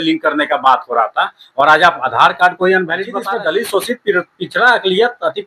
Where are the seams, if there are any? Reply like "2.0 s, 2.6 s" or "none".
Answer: 3.2 s